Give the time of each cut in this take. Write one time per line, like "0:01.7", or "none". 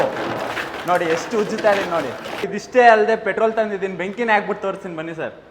0:02.3